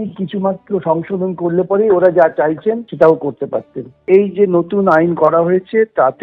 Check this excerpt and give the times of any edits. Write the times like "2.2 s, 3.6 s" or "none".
2.9 s, 4.0 s